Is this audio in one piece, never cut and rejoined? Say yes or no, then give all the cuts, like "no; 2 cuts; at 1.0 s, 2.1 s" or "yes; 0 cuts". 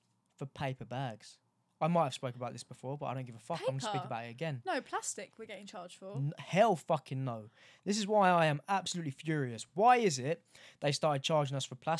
yes; 0 cuts